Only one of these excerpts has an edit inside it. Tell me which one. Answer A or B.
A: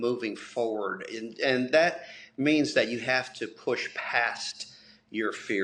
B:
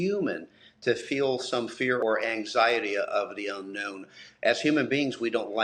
B